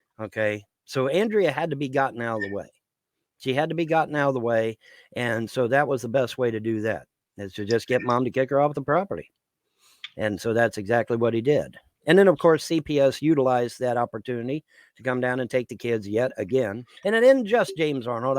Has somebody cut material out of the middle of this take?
yes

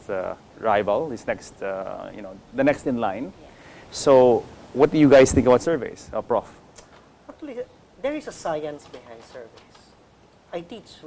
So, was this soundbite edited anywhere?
yes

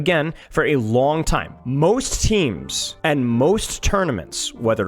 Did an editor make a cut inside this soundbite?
yes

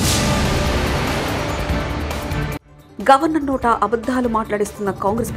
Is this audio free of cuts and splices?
yes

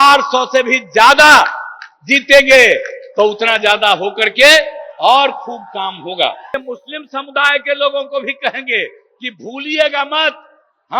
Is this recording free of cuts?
no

